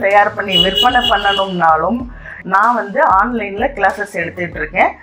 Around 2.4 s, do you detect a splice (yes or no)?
yes